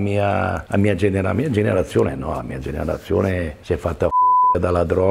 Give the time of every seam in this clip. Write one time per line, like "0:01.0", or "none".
0:03.6